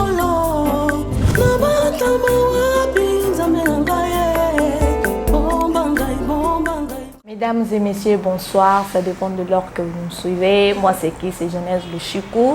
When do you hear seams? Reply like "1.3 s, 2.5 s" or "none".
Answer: 7.0 s